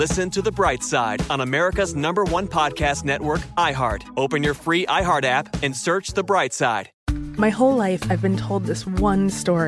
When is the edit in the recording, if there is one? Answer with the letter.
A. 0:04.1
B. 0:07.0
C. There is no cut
B